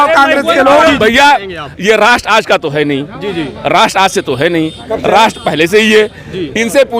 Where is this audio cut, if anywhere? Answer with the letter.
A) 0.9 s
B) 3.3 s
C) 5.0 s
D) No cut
A